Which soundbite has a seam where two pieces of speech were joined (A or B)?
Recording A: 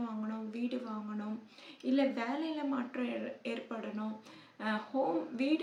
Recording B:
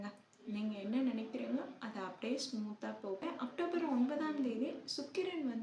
B